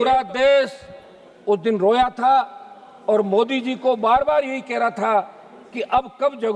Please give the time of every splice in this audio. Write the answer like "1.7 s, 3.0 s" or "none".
none